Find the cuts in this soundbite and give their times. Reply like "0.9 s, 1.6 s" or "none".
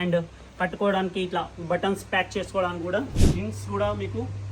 3.2 s